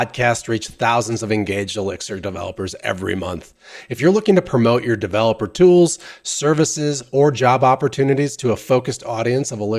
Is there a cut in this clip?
yes; 1 cut; at 1.0 s

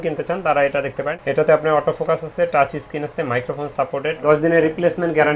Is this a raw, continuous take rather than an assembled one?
no; 2 cuts; at 1.2 s, 4.2 s

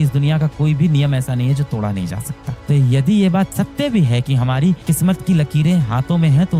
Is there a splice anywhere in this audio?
no; 0 cuts

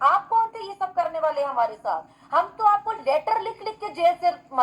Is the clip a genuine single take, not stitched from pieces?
no; 1 cut; at 2.1 s

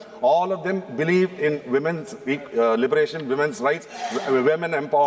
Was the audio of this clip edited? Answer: no; 0 cuts

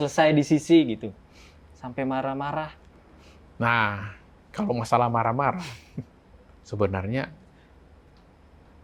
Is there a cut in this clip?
no; 0 cuts

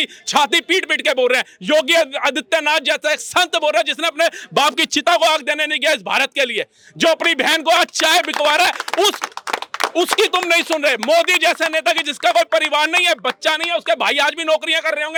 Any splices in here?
no; 0 cuts

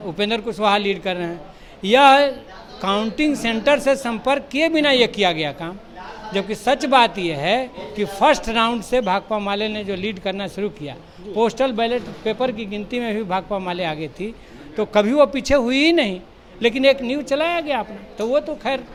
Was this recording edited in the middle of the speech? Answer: no; 0 cuts

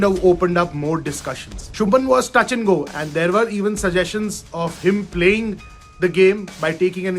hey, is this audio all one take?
no; 2 cuts; at 1.7 s, 2.9 s

